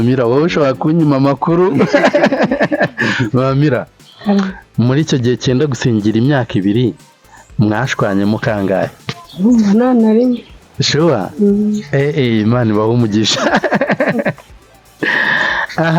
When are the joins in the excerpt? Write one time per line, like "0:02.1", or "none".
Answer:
none

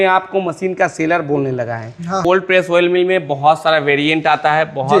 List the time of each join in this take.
0:02.2

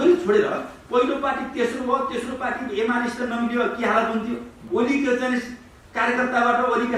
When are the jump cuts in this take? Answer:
0:04.5

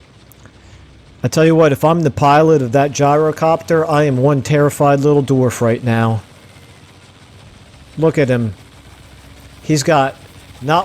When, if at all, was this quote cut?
0:01.0
0:06.2
0:07.9

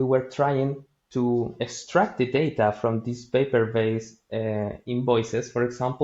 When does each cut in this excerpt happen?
none

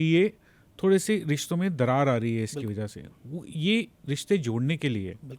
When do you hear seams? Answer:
none

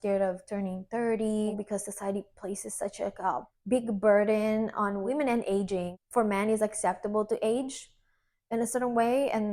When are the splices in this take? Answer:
0:01.5

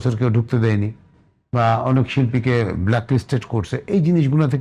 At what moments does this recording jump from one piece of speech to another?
none

